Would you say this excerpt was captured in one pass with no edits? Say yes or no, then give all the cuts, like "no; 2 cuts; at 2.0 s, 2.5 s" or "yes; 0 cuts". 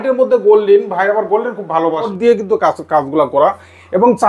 no; 1 cut; at 2.1 s